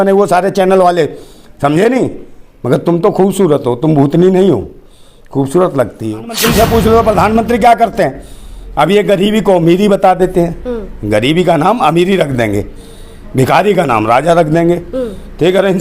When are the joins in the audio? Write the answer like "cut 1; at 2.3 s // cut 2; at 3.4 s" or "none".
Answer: cut 1; at 6.4 s